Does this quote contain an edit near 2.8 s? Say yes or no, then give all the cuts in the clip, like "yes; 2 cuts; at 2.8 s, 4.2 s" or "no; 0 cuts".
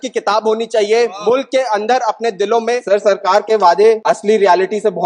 yes; 2 cuts; at 2.8 s, 4.0 s